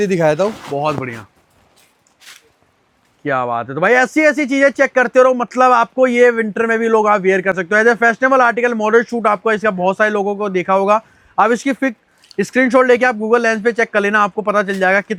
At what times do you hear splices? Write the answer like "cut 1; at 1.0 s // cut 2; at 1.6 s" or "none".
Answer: none